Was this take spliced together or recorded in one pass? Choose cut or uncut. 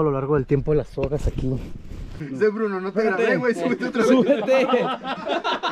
cut